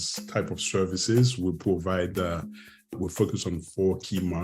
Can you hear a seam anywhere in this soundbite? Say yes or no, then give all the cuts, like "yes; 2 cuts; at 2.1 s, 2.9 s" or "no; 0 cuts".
yes; 1 cut; at 2.9 s